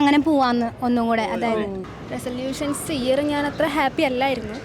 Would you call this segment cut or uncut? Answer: cut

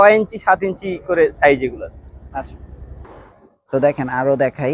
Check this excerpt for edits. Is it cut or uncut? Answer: uncut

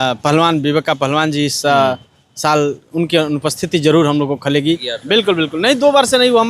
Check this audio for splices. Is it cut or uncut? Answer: cut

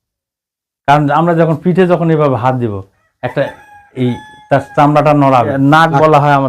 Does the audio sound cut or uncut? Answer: cut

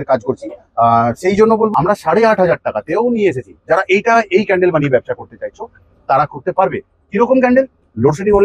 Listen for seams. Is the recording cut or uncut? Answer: cut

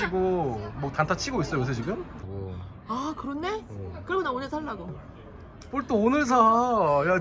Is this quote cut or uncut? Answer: cut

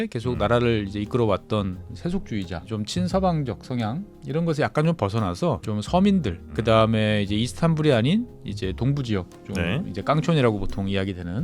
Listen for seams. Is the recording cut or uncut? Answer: cut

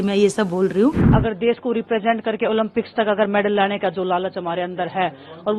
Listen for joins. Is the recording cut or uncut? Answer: cut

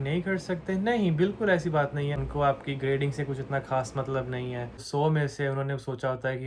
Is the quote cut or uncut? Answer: cut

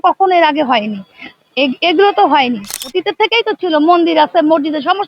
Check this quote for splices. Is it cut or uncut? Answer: cut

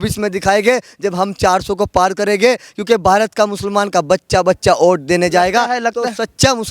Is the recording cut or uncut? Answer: uncut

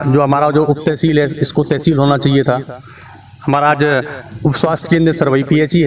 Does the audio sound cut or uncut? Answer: uncut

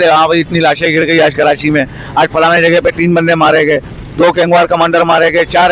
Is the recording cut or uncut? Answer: uncut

